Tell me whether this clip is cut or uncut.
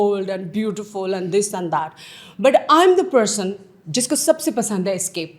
uncut